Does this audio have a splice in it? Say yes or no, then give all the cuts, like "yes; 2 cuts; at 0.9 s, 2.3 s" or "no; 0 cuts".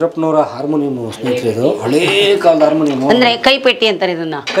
no; 0 cuts